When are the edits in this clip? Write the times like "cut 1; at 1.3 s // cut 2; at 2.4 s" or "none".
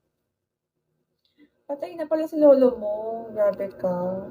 none